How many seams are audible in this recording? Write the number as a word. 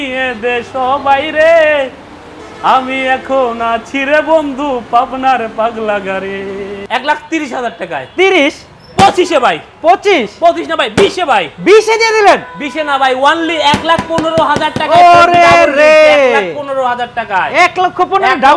one